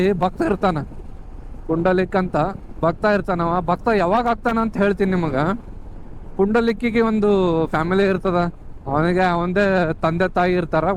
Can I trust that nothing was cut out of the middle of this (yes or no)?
yes